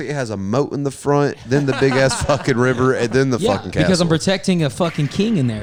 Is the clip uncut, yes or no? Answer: yes